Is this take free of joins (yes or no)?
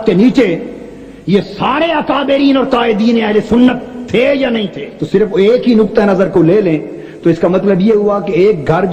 no